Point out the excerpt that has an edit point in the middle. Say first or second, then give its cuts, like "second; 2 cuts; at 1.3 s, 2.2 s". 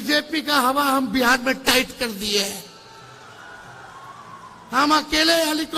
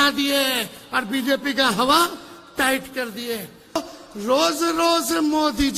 second; 1 cut; at 3.9 s